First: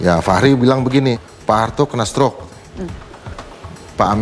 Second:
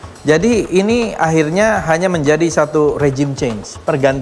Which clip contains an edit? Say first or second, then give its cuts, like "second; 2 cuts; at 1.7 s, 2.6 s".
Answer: first; 1 cut; at 1.3 s